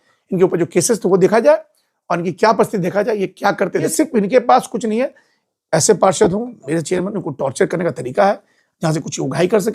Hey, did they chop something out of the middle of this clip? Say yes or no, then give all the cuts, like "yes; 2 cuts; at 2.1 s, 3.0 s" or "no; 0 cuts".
yes; 1 cut; at 3.9 s